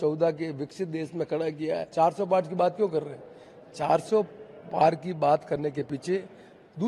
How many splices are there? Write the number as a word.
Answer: one